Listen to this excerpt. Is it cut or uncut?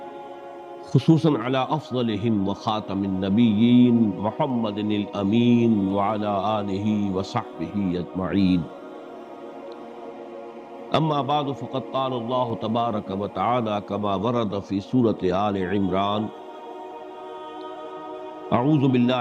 cut